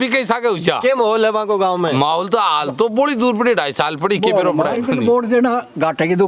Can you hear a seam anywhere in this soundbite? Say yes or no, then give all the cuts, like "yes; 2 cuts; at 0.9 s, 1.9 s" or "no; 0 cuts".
yes; 1 cut; at 4.8 s